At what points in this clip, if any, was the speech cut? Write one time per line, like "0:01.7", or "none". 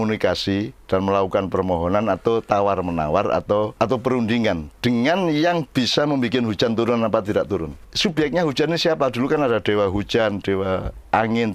0:03.7
0:07.8